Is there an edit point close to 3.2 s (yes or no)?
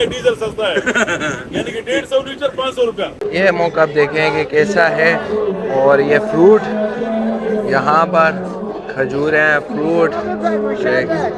yes